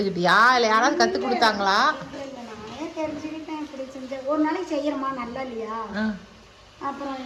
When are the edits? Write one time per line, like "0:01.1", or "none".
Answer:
none

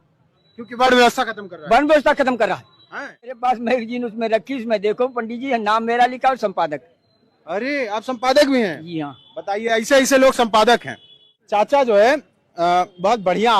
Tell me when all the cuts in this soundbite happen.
0:03.3
0:11.4

